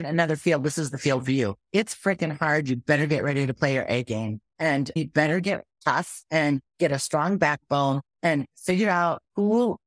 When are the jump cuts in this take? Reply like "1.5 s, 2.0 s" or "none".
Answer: 1.6 s, 4.7 s, 5.7 s, 6.7 s, 8.1 s